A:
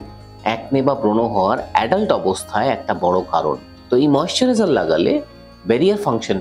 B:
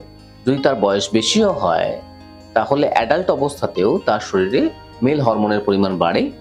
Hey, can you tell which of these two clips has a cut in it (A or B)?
A